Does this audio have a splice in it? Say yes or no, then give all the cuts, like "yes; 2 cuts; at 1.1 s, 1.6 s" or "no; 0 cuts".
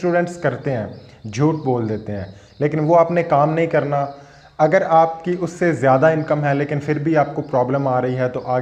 no; 0 cuts